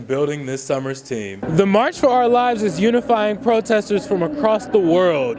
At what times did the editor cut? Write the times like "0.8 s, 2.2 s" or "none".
1.4 s